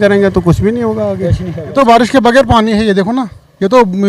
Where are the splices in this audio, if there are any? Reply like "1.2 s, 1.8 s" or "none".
1.7 s